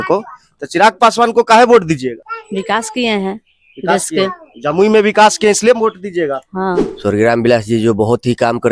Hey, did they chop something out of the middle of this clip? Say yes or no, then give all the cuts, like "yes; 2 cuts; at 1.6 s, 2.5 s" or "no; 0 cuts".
yes; 2 cuts; at 2.3 s, 6.9 s